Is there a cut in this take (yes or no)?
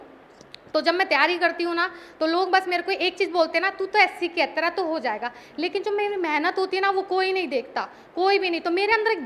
no